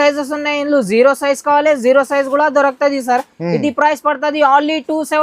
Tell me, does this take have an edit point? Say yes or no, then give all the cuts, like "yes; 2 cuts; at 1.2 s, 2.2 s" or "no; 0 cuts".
no; 0 cuts